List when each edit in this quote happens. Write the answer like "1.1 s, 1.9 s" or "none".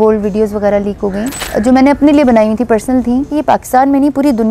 1.4 s, 3.3 s

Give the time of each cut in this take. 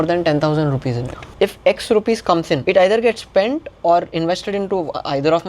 1.3 s, 2.6 s

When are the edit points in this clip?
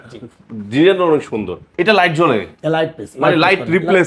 1.6 s

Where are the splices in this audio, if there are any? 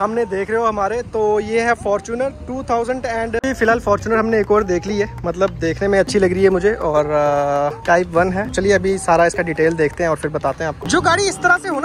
3.4 s, 10.8 s

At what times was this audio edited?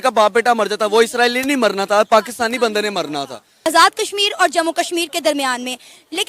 3.7 s

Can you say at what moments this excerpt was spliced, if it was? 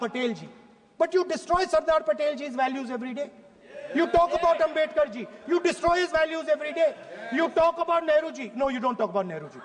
none

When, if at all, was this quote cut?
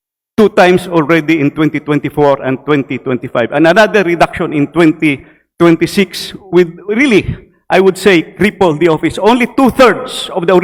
none

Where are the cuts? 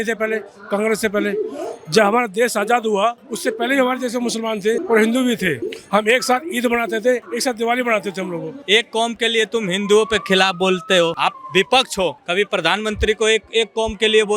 3.3 s, 4.8 s, 5.7 s, 7.3 s, 8.5 s, 11.3 s, 12.2 s

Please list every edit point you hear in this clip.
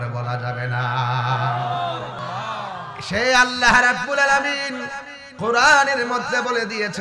2.2 s

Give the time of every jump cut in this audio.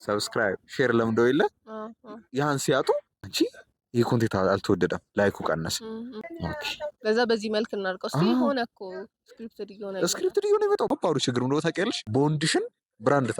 3.2 s, 6.2 s, 10.9 s, 12.0 s

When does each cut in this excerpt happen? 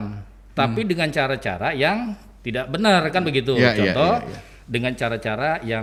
none

